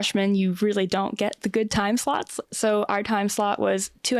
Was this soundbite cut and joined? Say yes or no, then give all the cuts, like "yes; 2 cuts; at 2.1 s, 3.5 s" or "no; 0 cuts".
no; 0 cuts